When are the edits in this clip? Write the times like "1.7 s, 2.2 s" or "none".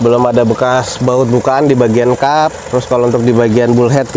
none